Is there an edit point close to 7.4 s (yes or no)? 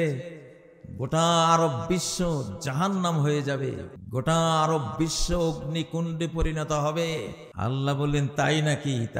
yes